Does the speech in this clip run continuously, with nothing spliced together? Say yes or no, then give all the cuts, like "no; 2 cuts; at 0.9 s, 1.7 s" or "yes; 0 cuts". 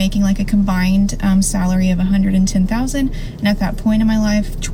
yes; 0 cuts